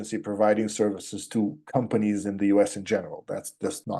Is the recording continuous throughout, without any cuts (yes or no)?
yes